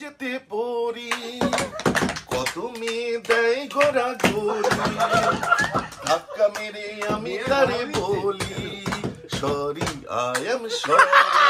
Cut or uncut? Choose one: uncut